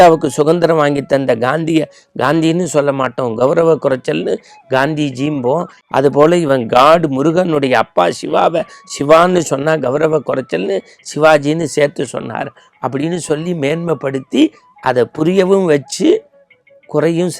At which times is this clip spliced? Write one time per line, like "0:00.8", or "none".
0:05.8